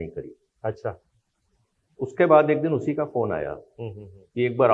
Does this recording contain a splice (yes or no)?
no